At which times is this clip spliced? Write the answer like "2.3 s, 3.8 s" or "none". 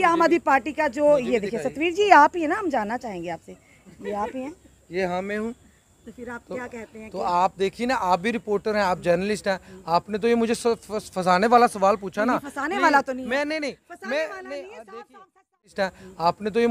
15.7 s